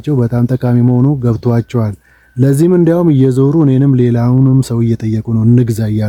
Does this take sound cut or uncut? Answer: uncut